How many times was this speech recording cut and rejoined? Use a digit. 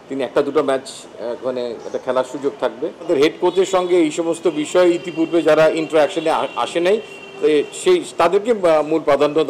1